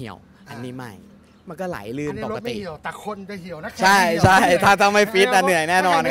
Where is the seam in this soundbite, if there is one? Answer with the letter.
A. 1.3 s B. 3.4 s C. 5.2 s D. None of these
D